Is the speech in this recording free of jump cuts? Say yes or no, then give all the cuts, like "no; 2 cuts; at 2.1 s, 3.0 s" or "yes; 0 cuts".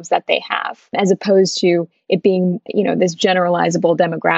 yes; 0 cuts